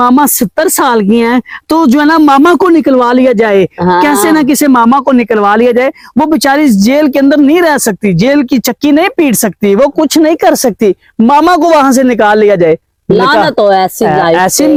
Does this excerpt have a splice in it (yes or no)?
no